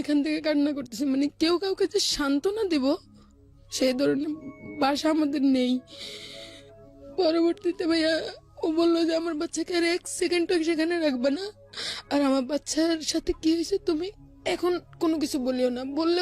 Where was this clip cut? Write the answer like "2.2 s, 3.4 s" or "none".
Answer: none